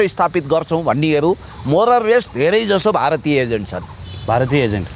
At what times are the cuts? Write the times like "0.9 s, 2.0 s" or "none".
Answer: none